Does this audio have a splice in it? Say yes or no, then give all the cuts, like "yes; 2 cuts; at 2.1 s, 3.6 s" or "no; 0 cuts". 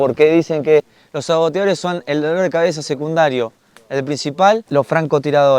yes; 1 cut; at 4.6 s